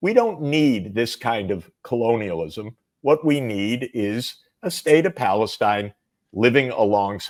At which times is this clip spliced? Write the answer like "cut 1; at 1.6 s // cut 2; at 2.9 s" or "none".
none